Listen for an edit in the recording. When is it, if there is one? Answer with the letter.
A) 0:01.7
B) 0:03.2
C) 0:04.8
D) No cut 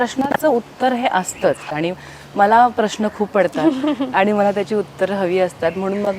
A